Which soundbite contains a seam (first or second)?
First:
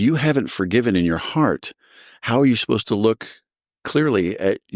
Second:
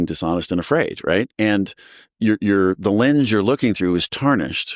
second